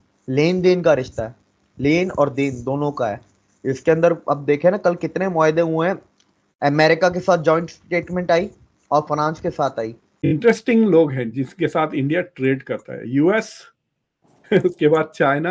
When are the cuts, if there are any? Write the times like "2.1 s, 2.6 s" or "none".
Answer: 3.2 s, 10.3 s